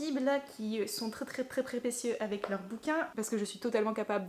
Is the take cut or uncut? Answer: cut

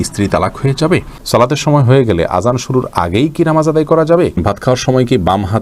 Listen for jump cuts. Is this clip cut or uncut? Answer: cut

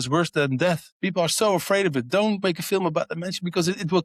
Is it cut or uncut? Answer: cut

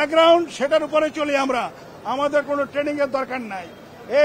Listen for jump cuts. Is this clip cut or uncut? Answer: uncut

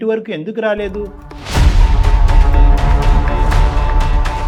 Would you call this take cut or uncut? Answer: uncut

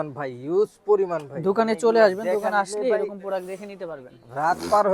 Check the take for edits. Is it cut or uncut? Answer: uncut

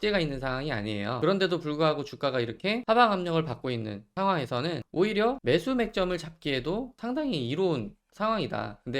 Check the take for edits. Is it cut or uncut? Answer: cut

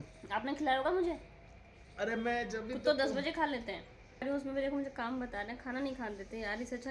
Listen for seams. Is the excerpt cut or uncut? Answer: cut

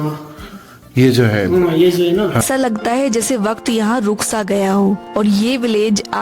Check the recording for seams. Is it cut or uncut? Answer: cut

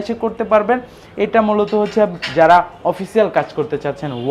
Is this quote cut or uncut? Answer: uncut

